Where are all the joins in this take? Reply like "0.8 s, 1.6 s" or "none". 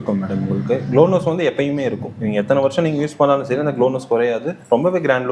none